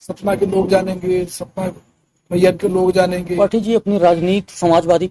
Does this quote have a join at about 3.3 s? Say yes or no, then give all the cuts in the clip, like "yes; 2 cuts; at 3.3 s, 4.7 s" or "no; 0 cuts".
yes; 1 cut; at 3.3 s